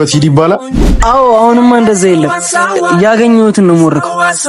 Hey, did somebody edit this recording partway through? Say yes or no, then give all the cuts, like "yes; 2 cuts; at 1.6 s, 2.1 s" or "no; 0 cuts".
yes; 1 cut; at 1.0 s